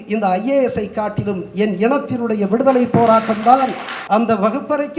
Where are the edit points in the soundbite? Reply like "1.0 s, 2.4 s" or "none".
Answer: 3.9 s

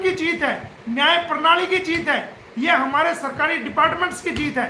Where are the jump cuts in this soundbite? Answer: none

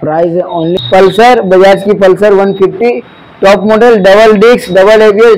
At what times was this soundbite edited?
1.1 s

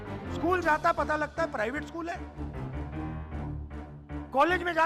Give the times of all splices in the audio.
2.2 s, 3.8 s

